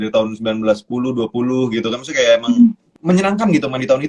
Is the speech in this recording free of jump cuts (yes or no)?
no